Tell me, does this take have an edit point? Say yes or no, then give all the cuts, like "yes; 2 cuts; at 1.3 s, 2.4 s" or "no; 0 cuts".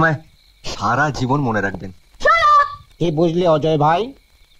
yes; 1 cut; at 2.8 s